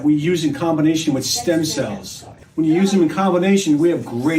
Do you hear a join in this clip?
yes; 1 cut; at 2.3 s

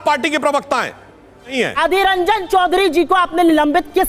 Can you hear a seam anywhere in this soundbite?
yes; 1 cut; at 1.5 s

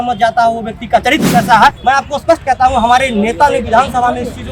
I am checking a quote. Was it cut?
yes; 1 cut; at 1.8 s

